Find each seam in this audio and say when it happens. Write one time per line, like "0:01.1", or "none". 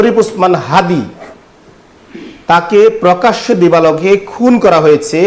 none